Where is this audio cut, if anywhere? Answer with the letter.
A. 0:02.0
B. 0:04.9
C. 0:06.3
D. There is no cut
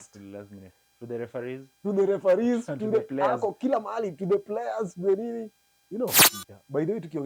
C